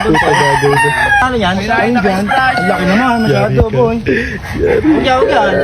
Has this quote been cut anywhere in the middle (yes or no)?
yes